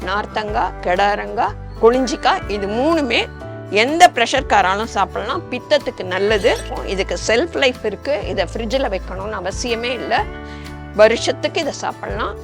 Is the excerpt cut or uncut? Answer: cut